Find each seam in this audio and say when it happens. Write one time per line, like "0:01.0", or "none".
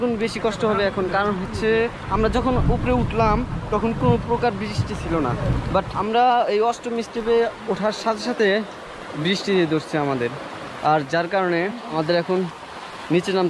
0:02.0
0:06.0
0:11.8